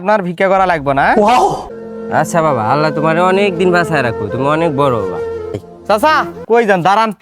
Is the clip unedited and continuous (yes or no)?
no